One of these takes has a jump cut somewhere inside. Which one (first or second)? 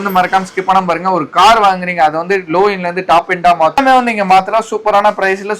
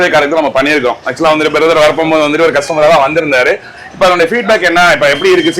first